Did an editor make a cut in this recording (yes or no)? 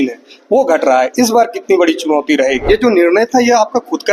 yes